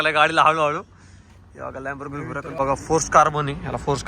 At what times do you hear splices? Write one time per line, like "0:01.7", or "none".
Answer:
0:02.6